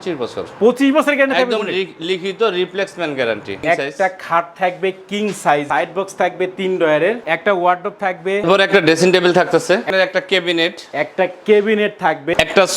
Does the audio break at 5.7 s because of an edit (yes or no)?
yes